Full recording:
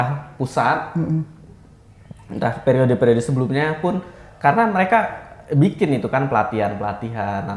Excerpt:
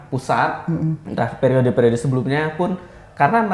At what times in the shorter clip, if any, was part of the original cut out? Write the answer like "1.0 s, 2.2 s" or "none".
1.0 s